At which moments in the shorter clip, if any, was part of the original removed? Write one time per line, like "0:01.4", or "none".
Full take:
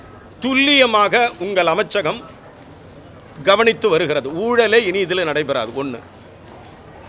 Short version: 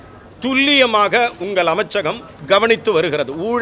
0:02.3

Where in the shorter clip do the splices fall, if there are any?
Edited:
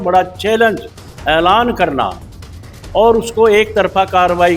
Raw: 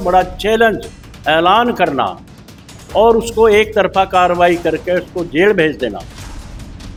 none

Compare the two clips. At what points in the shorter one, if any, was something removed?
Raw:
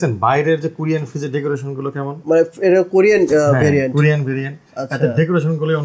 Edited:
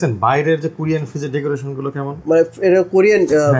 none

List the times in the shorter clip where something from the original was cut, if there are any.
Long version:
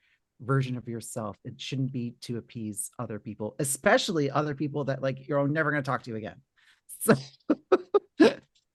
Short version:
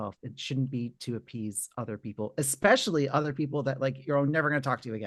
none

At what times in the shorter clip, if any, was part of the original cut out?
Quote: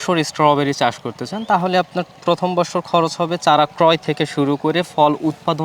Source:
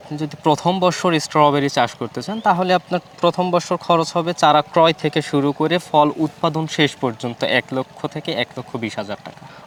none

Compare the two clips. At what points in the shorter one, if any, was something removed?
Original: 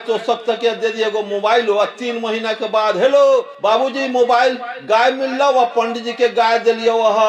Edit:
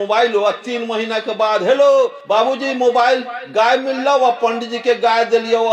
none

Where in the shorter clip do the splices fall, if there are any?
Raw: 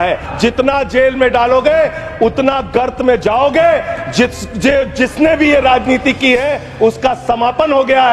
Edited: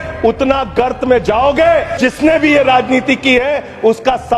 0:01.9

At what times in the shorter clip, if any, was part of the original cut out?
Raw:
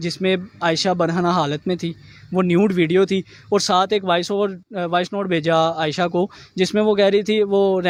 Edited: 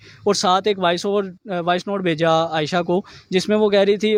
none

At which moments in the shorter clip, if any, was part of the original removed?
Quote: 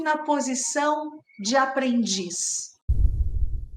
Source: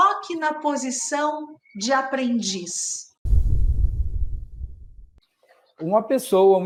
0:02.9

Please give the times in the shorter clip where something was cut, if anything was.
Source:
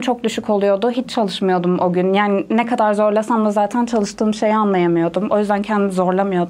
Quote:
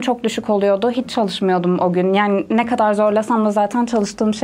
none

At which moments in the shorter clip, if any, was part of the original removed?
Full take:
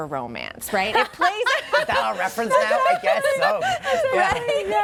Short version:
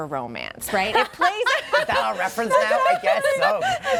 none

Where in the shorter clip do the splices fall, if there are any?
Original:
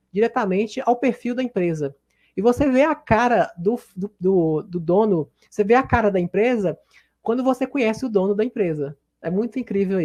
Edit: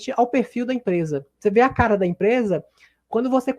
0:01.3

